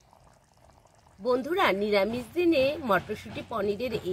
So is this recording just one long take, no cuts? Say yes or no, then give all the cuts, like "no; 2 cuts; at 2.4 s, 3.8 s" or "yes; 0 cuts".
no; 1 cut; at 1.1 s